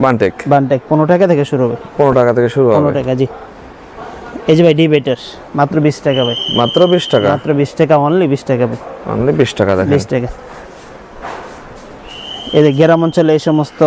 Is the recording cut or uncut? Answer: uncut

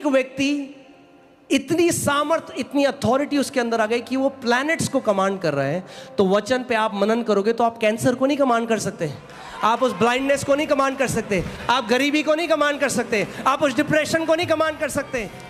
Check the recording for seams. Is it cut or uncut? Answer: uncut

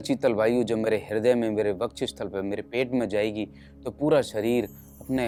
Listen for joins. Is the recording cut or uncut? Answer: uncut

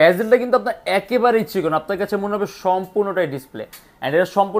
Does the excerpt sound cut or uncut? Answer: uncut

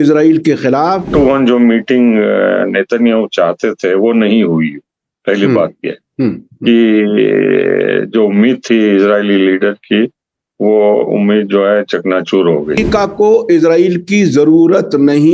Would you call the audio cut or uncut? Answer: cut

